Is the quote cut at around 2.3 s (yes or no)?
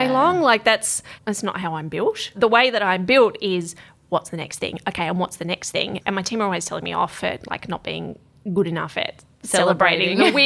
yes